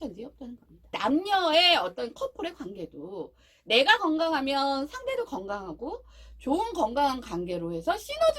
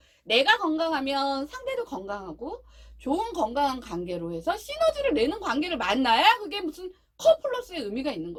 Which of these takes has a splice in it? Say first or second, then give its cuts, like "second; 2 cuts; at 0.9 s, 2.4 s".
first; 1 cut; at 1.0 s